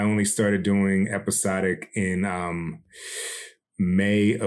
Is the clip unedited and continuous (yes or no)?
no